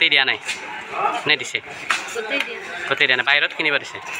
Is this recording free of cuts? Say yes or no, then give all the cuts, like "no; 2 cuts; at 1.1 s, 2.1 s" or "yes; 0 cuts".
yes; 0 cuts